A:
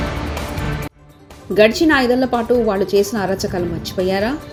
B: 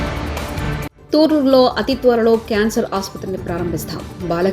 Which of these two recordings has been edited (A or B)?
B